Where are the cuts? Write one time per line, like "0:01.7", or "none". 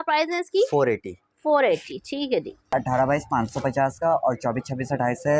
0:02.7